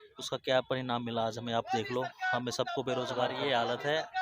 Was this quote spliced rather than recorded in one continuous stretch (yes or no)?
yes